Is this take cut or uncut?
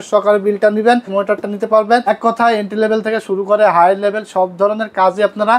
cut